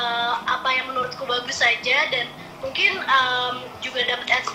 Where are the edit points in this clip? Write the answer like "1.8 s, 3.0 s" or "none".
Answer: none